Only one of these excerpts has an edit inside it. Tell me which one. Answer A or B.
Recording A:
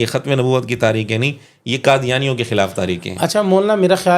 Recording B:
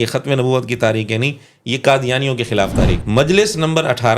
B